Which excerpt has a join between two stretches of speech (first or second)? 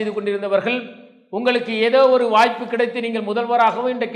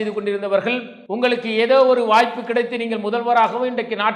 second